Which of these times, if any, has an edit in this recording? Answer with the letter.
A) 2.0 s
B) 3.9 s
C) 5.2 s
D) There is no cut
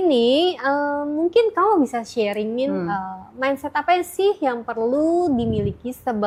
D